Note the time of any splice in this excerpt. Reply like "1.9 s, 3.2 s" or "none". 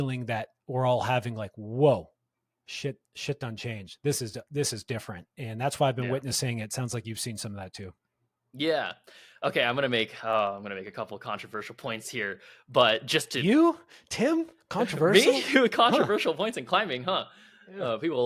none